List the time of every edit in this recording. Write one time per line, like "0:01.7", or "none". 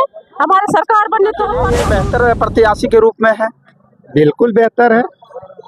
0:01.8